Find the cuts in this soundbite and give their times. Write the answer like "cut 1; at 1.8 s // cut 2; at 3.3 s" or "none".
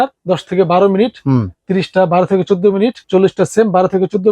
none

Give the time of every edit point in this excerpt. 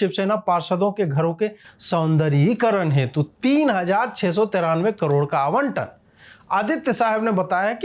none

